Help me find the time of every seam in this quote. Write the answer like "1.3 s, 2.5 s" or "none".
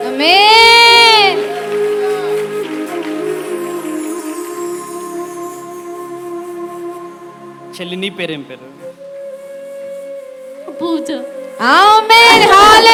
none